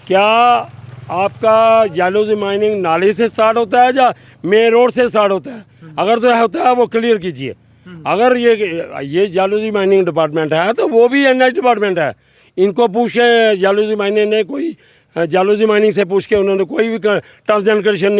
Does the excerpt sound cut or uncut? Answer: uncut